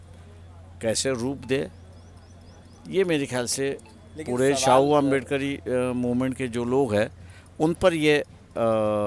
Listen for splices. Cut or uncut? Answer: uncut